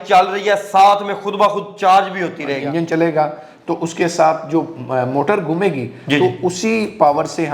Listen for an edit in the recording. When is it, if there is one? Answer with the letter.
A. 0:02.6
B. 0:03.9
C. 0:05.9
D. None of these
A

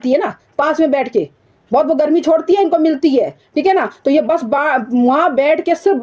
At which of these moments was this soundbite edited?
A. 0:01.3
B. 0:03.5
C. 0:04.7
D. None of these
D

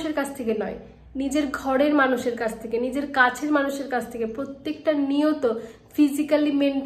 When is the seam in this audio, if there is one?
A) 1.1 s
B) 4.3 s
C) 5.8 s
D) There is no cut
D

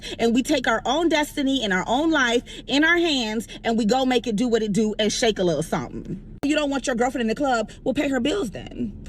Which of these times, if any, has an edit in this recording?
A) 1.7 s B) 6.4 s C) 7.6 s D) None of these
B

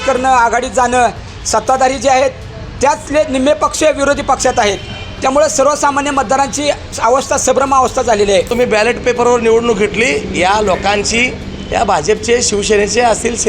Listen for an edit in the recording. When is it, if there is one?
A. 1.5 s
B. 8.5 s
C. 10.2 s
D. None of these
B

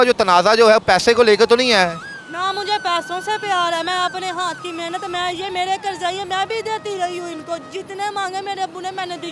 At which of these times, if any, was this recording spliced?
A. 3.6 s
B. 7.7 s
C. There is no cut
C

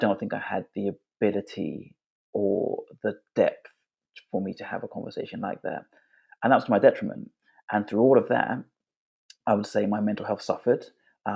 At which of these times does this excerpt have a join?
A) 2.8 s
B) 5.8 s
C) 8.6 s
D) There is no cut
D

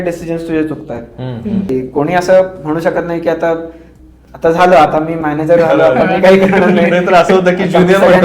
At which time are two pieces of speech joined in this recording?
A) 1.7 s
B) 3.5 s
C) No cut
A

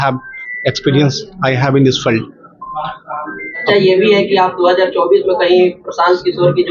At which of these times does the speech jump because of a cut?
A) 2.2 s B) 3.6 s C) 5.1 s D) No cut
B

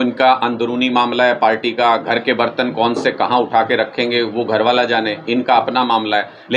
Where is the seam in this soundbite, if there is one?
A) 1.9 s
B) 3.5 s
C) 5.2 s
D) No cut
D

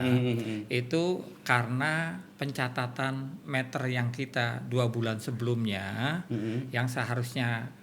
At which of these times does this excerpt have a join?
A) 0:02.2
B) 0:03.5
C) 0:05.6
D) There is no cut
A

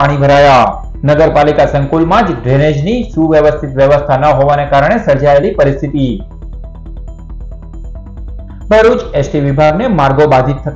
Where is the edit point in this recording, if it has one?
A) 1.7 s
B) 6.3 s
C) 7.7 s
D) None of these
D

